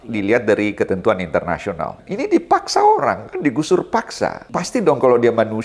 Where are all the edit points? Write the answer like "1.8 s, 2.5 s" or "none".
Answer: 2.0 s, 4.5 s